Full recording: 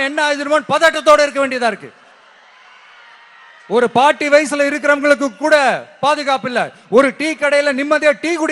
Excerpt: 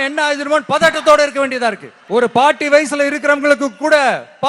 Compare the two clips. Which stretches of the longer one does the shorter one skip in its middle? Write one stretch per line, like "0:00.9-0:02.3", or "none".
0:01.9-0:03.5